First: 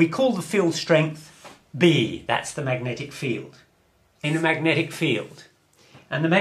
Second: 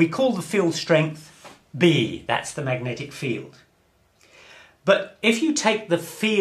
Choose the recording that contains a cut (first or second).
second